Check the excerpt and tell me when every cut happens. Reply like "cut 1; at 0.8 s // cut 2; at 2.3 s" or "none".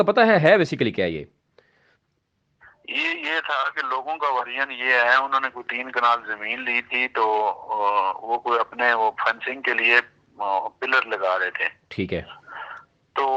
none

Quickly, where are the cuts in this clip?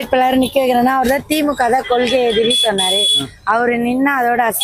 none

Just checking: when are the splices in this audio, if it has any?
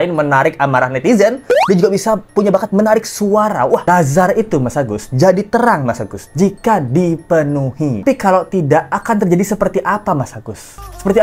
cut 1; at 3.8 s // cut 2; at 8.0 s

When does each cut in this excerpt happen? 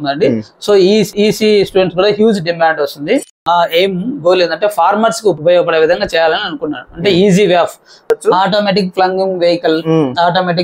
cut 1; at 3.4 s // cut 2; at 8.1 s

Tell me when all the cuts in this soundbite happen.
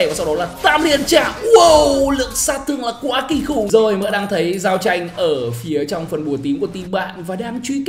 cut 1; at 3.7 s

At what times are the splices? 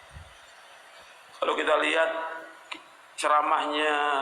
cut 1; at 1.2 s

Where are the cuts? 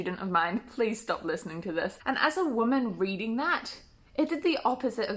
cut 1; at 2.0 s

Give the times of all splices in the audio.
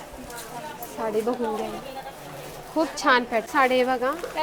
cut 1; at 3.4 s

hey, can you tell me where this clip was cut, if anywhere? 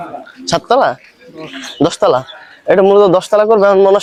none

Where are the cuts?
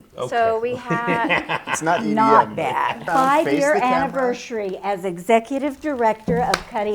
cut 1; at 3.0 s

